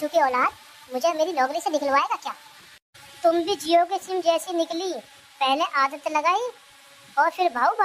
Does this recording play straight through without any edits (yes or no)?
yes